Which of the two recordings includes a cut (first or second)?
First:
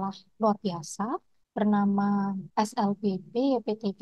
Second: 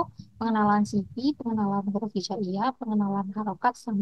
first